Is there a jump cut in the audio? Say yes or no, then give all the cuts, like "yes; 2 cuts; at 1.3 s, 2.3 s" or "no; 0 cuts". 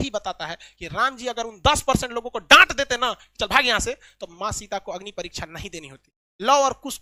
no; 0 cuts